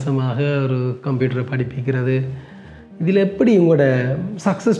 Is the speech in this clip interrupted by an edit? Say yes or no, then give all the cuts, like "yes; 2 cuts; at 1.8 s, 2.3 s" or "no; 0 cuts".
no; 0 cuts